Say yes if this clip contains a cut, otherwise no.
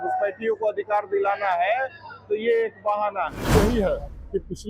yes